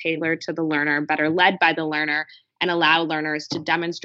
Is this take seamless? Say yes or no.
yes